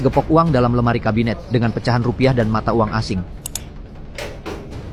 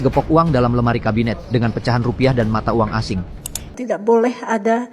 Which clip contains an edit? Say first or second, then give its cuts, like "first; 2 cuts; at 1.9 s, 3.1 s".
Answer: second; 1 cut; at 3.8 s